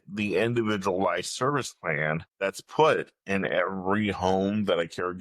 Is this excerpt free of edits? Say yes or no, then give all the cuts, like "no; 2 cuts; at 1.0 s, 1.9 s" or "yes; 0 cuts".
no; 1 cut; at 2.3 s